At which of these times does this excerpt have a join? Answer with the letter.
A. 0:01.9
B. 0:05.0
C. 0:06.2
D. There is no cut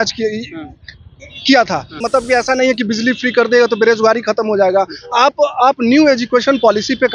A